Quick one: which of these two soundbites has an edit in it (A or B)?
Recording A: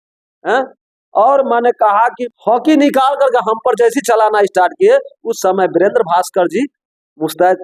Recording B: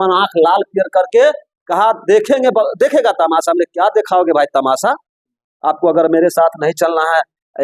A